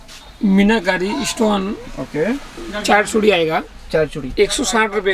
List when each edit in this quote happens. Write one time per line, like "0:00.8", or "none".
none